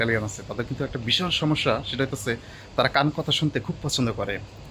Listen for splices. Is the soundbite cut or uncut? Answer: uncut